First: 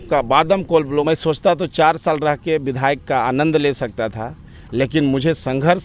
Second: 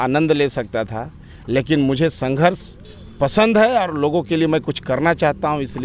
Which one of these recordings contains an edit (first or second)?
first